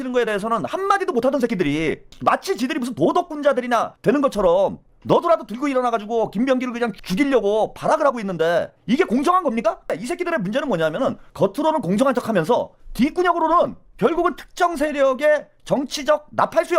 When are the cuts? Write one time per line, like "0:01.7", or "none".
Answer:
0:09.9
0:11.3